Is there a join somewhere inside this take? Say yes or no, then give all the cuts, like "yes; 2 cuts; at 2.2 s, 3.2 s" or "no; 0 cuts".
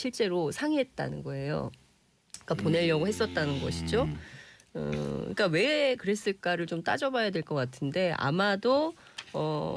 yes; 1 cut; at 6.2 s